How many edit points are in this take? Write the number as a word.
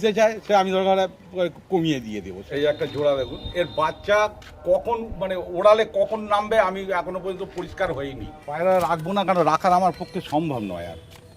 two